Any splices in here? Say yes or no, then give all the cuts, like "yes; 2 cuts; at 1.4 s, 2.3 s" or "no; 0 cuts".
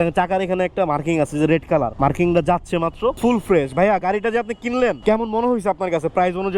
yes; 3 cuts; at 1.9 s, 3.2 s, 5.0 s